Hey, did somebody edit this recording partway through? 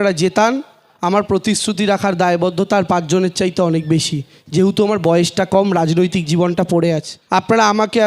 yes; 1 cut; at 7.1 s

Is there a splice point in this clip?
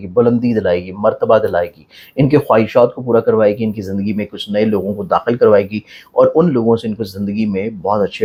no; 0 cuts

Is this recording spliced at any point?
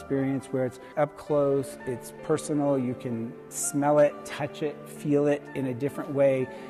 no; 0 cuts

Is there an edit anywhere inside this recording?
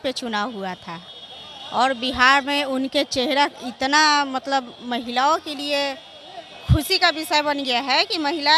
no; 0 cuts

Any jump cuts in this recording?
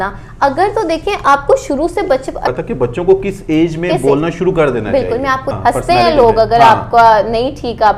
yes; 2 cuts; at 2.5 s, 5.5 s

